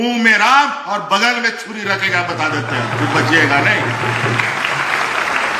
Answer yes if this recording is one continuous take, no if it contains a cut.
yes